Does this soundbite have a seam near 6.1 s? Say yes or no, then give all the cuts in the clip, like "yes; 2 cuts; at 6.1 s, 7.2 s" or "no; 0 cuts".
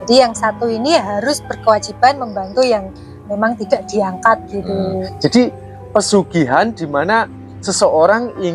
no; 1 cut; at 4.8 s